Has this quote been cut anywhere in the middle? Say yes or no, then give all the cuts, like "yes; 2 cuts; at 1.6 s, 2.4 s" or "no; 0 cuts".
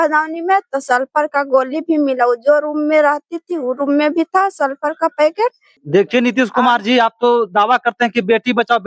yes; 1 cut; at 5.7 s